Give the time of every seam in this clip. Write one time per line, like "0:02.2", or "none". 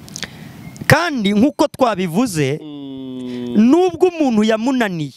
none